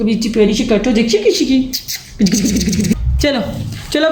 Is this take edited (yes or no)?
yes